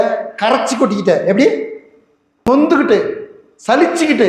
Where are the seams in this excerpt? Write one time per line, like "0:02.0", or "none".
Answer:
0:02.5